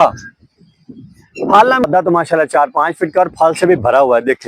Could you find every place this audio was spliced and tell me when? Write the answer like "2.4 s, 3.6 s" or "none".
1.8 s